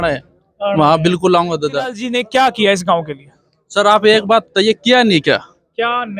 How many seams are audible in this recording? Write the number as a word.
one